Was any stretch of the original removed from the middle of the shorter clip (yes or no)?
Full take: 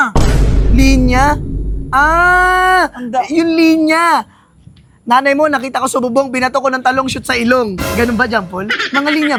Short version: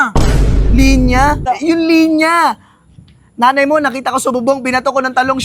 yes